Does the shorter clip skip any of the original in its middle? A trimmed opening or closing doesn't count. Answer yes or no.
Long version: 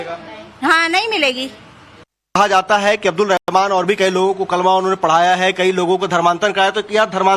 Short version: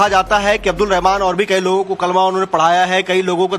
yes